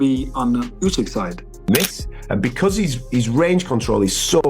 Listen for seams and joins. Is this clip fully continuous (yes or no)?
no